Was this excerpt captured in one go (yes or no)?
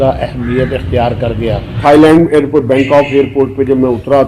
no